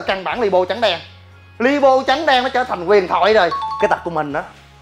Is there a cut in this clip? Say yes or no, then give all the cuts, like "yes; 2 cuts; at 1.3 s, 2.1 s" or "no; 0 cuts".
yes; 1 cut; at 3.7 s